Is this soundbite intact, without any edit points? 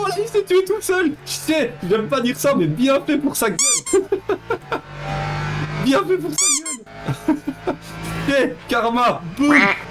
yes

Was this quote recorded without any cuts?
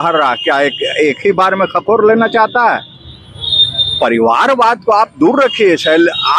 yes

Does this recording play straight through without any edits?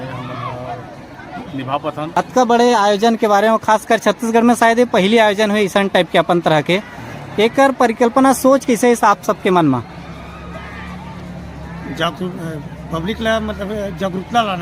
no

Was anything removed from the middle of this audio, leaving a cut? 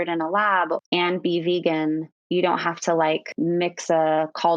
yes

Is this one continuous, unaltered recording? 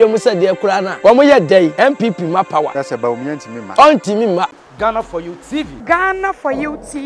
no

